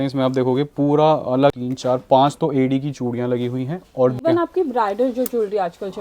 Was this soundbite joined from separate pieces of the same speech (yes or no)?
yes